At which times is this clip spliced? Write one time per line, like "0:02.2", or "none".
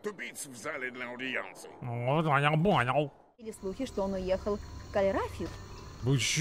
0:03.6

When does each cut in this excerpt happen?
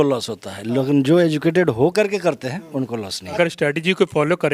0:03.3

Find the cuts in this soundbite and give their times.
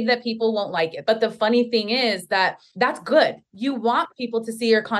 0:01.0
0:02.6
0:03.5

